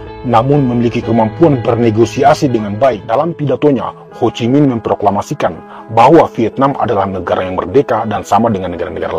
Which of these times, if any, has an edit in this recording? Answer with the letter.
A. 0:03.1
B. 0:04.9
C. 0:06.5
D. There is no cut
A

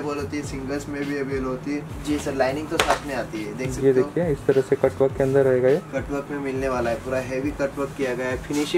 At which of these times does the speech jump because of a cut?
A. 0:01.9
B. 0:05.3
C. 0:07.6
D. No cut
A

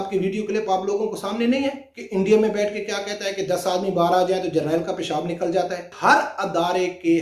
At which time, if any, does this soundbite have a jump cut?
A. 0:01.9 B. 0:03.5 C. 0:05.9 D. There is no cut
C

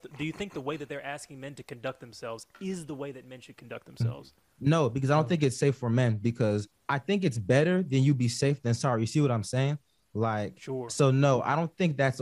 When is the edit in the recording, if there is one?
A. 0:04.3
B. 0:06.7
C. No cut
B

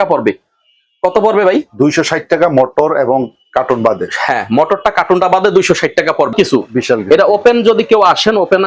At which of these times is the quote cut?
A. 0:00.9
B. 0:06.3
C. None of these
B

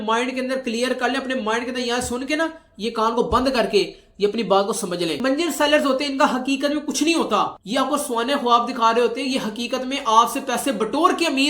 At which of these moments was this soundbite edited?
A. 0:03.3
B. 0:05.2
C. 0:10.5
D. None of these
B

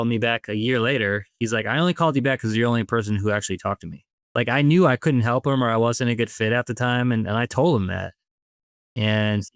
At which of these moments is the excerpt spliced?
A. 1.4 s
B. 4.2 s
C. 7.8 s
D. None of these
B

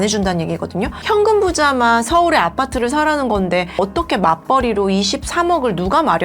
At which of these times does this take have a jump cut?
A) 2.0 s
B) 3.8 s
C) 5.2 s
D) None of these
B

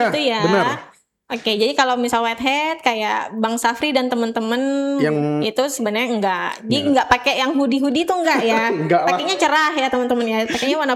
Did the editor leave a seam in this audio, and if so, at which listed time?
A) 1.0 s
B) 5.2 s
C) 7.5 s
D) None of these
D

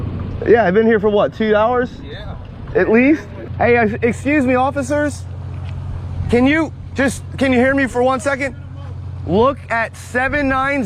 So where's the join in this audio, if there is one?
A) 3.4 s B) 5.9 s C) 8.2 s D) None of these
A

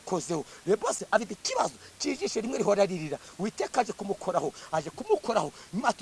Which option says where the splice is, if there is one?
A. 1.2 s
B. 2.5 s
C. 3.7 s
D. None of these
A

